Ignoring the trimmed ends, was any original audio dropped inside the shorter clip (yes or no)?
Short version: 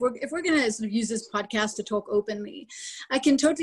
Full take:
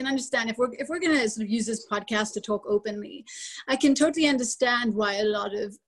no